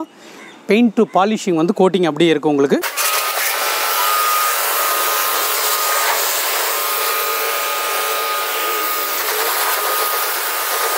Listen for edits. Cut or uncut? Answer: uncut